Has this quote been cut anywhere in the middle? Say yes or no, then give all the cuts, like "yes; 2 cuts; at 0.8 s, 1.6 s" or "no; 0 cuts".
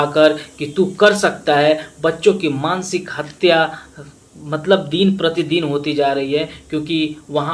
no; 0 cuts